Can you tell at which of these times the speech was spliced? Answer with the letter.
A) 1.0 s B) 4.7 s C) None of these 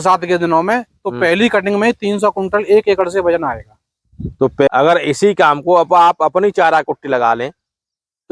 B